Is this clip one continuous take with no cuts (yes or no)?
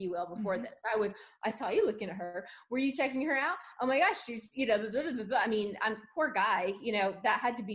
yes